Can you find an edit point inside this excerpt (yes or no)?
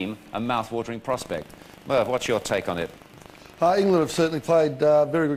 no